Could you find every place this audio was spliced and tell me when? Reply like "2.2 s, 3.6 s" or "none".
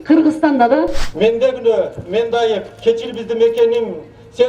1.0 s